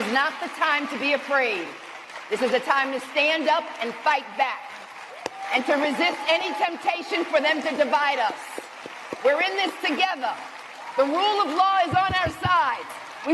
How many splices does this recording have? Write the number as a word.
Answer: zero